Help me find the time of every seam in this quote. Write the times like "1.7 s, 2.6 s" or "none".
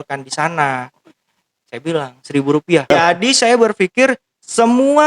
2.9 s